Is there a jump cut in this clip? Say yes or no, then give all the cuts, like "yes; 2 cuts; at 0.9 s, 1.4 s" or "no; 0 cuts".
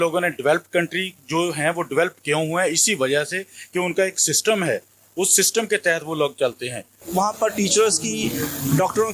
yes; 1 cut; at 7.1 s